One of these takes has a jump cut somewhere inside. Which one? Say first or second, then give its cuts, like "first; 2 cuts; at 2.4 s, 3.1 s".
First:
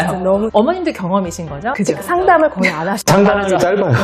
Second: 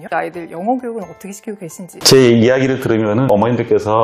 second; 1 cut; at 1.9 s